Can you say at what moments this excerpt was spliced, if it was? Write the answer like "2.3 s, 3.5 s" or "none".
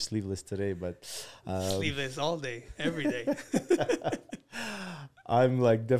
none